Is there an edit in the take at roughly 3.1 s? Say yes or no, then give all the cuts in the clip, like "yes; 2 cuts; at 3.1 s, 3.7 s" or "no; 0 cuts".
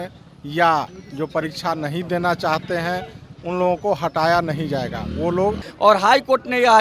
no; 1 cut; at 5.6 s